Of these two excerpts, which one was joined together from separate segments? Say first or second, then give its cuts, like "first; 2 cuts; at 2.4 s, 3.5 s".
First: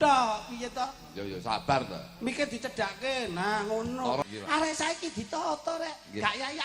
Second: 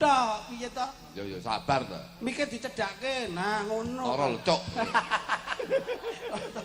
first; 1 cut; at 4.2 s